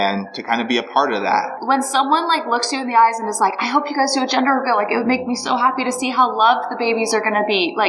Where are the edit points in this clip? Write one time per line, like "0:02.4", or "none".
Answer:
0:01.6